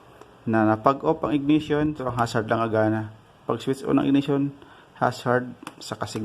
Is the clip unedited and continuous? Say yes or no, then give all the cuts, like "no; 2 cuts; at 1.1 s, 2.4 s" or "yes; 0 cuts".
no; 1 cut; at 2.0 s